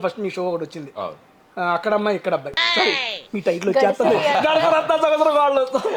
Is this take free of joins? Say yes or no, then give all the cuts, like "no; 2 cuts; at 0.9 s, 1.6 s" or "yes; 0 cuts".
yes; 0 cuts